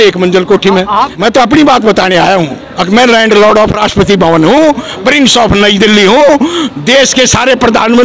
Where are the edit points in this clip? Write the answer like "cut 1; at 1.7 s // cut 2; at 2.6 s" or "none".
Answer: cut 1; at 1.1 s